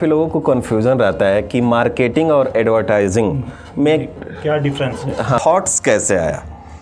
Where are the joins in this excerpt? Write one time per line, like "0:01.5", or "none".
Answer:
0:05.4